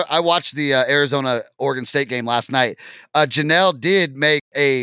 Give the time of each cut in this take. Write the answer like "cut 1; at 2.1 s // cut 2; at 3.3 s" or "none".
none